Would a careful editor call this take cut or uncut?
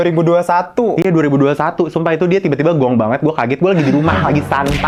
uncut